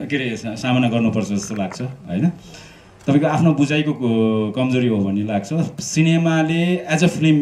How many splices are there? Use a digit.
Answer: 0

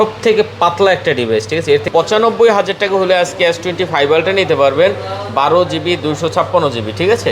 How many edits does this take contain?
1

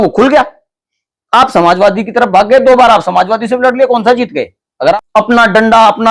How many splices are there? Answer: 1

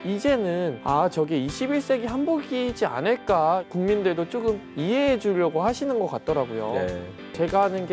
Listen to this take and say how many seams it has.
1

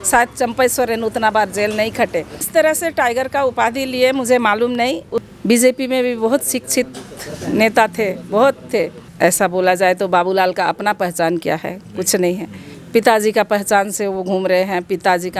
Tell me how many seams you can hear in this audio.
3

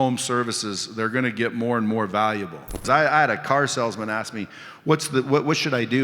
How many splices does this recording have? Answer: 1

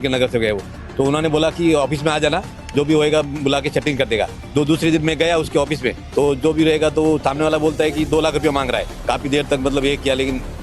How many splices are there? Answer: 3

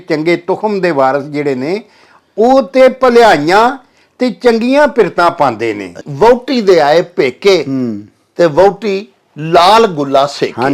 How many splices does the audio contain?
1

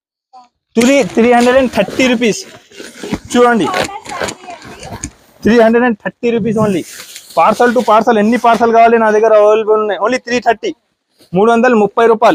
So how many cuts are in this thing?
0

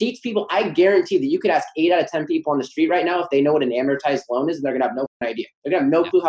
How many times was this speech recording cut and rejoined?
1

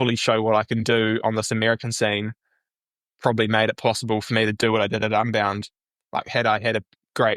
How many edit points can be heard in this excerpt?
0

